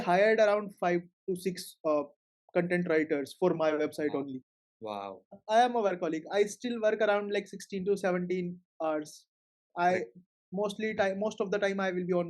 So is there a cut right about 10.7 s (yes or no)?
no